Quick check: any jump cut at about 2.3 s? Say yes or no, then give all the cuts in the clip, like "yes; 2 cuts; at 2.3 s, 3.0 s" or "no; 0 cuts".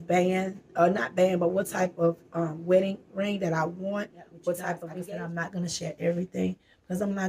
no; 1 cut; at 4.9 s